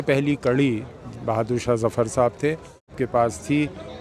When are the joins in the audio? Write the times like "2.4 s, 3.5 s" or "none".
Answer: 2.9 s